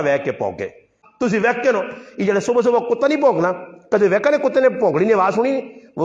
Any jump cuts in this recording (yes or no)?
yes